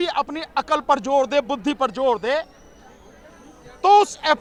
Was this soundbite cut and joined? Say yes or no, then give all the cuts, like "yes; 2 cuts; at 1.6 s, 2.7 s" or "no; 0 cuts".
no; 0 cuts